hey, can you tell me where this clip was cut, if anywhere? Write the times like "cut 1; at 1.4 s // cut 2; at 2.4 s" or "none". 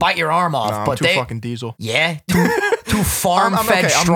cut 1; at 1.7 s